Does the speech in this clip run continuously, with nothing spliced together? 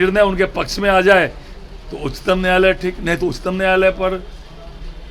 yes; 0 cuts

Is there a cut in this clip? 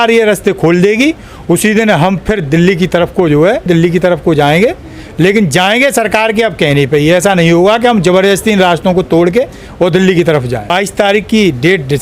yes; 2 cuts; at 3.7 s, 10.7 s

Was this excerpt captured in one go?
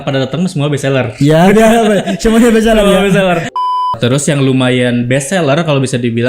no; 1 cut; at 3.5 s

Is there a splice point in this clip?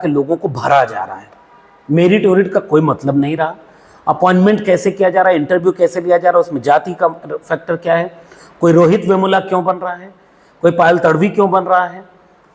no; 0 cuts

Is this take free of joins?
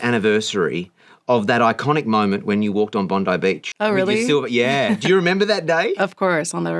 no; 1 cut; at 3.7 s

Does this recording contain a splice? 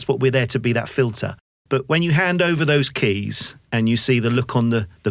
no; 0 cuts

